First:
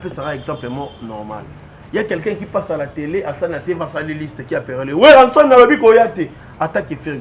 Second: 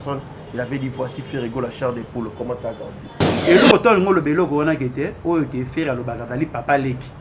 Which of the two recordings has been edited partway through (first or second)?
second